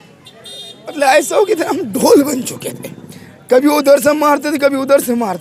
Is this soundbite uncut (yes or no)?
yes